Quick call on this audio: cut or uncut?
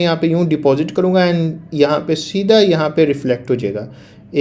uncut